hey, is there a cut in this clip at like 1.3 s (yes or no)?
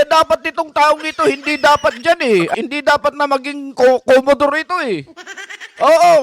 no